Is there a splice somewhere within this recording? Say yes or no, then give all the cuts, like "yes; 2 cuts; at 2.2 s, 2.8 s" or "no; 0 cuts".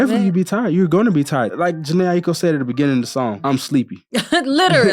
yes; 2 cuts; at 1.5 s, 3.7 s